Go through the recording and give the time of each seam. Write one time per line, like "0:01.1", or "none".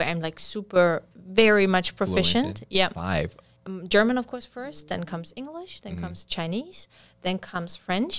0:03.5